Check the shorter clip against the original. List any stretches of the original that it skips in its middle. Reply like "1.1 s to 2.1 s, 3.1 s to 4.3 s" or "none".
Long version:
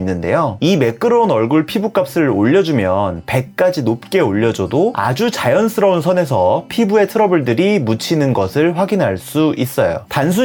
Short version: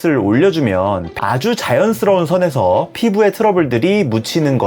3.3 s to 4.9 s